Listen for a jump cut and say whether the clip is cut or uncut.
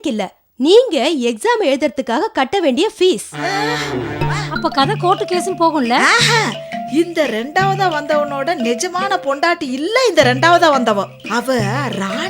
cut